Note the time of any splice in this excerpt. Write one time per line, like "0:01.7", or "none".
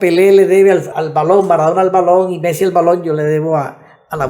0:00.9